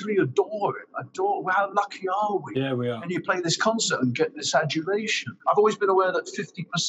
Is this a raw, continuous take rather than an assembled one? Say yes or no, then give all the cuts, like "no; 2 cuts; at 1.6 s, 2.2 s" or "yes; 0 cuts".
no; 2 cuts; at 3.0 s, 5.3 s